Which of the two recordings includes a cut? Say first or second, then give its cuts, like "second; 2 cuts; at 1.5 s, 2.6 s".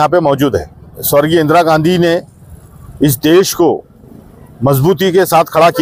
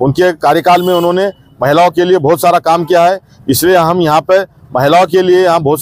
first; 1 cut; at 0.9 s